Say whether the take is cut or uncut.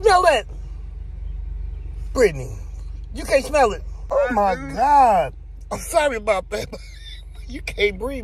cut